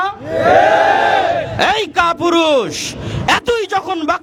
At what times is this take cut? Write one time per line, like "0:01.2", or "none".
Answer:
none